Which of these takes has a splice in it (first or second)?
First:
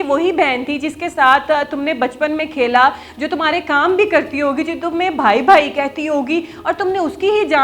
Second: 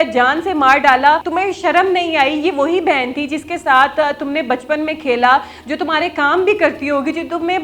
second